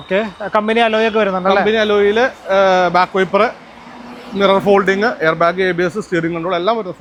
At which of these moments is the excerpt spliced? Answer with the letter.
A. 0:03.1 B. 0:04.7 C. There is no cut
C